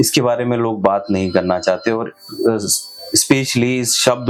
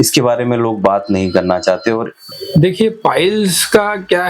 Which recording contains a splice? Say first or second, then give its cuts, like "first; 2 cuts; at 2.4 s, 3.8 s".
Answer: second; 1 cut; at 2.2 s